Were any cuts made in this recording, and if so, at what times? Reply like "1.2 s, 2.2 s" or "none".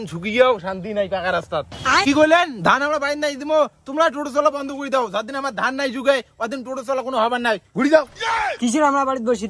2.0 s